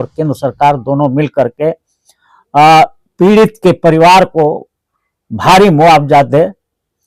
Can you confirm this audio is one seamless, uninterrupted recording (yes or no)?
yes